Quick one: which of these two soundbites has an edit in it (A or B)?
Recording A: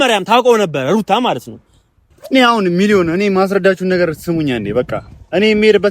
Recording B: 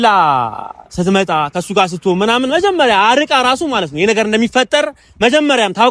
A